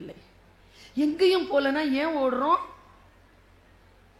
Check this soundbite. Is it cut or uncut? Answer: uncut